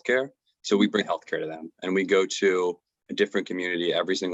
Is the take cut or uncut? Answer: cut